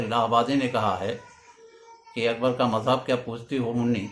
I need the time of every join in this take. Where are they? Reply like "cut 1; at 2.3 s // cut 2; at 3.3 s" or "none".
none